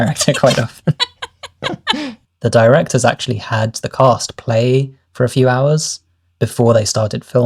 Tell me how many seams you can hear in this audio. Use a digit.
2